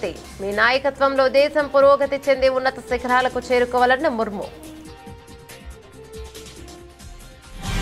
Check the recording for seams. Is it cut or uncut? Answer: cut